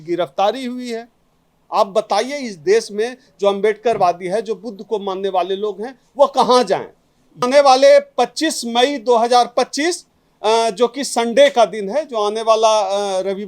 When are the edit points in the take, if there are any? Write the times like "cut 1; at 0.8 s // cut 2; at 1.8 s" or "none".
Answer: cut 1; at 7.4 s